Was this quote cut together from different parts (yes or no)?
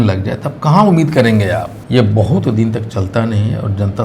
yes